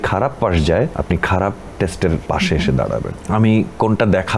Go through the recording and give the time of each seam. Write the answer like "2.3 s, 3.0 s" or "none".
1.0 s, 2.2 s, 3.1 s